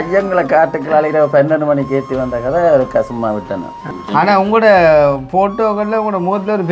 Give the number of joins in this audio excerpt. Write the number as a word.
one